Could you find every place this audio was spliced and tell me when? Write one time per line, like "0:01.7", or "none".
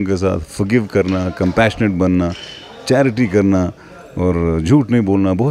none